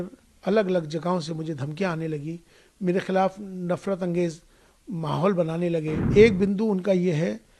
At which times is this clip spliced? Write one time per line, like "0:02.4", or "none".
0:06.0